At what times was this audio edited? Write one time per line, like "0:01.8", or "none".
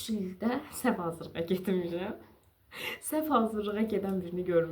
none